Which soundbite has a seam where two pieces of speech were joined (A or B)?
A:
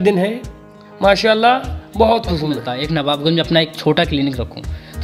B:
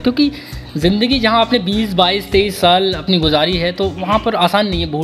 A